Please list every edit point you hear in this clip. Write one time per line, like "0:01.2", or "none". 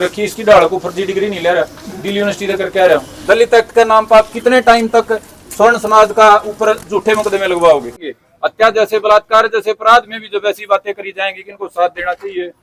0:03.1
0:08.1